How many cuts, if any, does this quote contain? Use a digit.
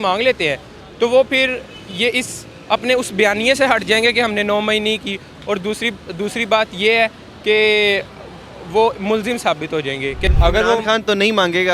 1